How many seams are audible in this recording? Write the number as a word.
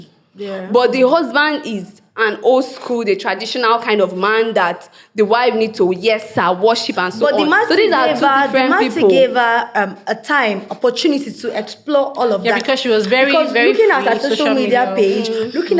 zero